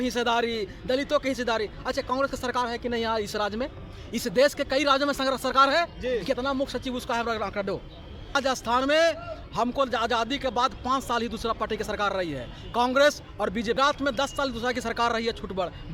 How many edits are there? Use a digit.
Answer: 2